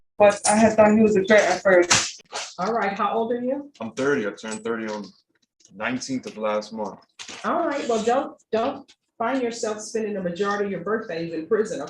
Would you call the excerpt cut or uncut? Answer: cut